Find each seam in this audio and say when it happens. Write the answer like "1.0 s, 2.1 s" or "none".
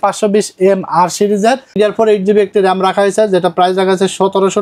1.7 s